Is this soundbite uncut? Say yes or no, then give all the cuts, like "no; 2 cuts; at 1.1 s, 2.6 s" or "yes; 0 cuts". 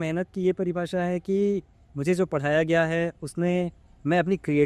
yes; 0 cuts